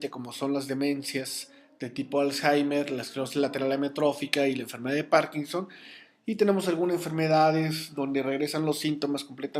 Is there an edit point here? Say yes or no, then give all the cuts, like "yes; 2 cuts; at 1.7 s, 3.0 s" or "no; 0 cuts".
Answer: yes; 1 cut; at 4.4 s